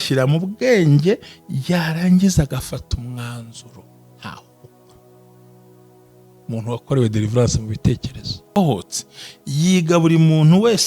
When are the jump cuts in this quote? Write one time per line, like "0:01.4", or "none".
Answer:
0:08.5